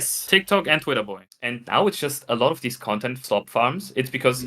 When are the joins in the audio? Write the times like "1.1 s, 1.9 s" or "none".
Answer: 1.2 s

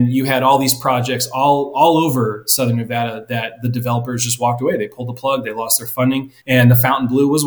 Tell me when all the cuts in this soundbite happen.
6.3 s

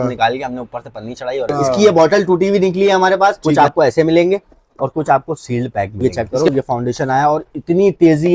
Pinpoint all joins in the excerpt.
1.5 s, 3.4 s, 6.0 s

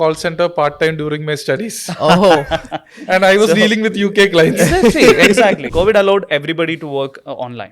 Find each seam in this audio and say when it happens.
5.6 s

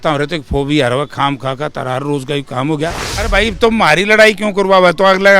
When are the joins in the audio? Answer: 3.1 s

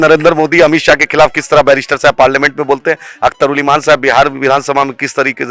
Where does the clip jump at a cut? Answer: none

